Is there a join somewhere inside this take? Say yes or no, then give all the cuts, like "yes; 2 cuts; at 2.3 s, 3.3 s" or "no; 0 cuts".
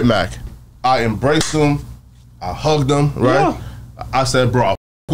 no; 0 cuts